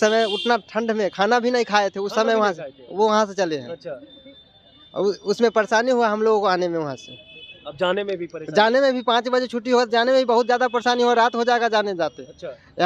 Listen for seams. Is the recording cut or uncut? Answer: uncut